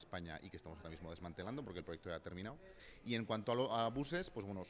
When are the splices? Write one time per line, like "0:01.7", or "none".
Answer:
0:02.8